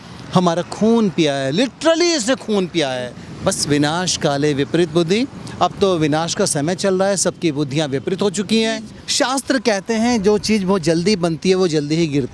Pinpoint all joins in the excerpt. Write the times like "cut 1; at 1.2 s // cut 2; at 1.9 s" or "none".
cut 1; at 3.2 s // cut 2; at 9.0 s